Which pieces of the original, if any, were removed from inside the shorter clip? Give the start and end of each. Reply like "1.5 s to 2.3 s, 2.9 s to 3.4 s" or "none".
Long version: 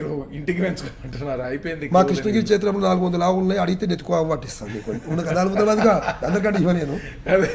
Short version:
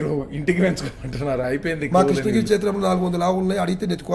none